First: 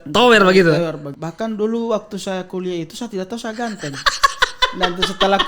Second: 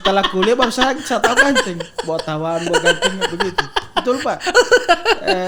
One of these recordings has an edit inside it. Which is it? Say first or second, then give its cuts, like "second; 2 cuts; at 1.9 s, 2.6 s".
first; 1 cut; at 1.1 s